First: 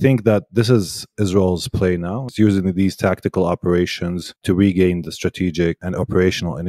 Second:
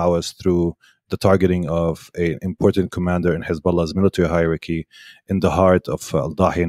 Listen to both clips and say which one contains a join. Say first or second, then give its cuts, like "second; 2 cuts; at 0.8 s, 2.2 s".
first; 3 cuts; at 2.3 s, 4.4 s, 5.8 s